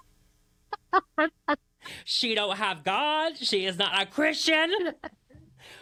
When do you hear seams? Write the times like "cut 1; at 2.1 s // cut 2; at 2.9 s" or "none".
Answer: none